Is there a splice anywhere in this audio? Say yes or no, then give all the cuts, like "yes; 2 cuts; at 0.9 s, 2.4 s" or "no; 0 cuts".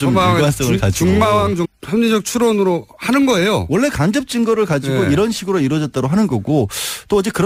no; 0 cuts